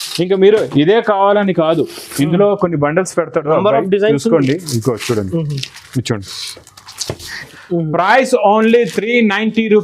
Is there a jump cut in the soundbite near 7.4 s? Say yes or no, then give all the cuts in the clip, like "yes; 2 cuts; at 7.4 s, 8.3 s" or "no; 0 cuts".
yes; 1 cut; at 7.4 s